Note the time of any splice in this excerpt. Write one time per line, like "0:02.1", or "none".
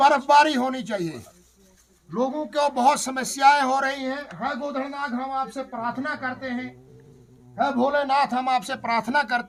none

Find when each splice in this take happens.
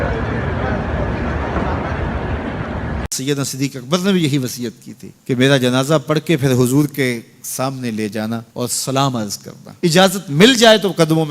0:03.1

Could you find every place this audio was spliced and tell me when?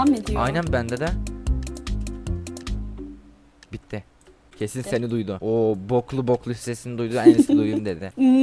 none

